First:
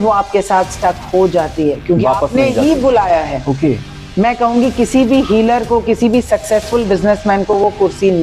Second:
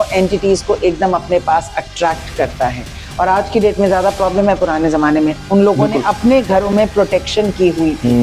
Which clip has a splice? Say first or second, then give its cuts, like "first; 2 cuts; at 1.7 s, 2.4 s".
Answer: first; 1 cut; at 4.0 s